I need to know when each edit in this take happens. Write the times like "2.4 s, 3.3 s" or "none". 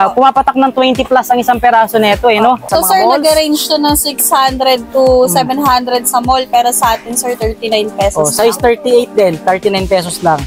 2.7 s